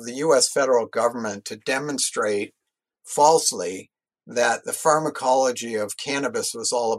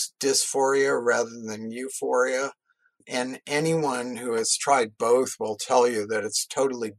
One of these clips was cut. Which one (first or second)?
second